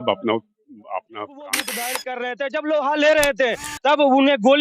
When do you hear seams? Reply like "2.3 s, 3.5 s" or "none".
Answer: 1.7 s